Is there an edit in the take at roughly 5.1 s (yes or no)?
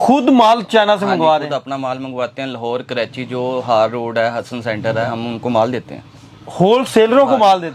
yes